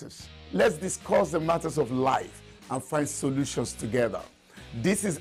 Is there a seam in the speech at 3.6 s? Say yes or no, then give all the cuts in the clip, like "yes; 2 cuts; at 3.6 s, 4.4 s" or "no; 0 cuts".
no; 0 cuts